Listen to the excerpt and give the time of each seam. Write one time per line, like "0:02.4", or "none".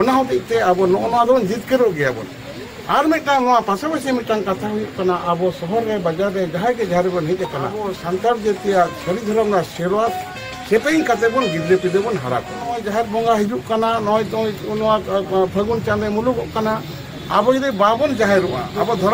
0:07.9
0:12.8